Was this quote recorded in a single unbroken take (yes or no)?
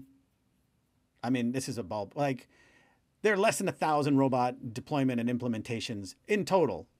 yes